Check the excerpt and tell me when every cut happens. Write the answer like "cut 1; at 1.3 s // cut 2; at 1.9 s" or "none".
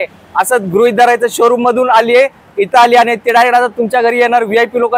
none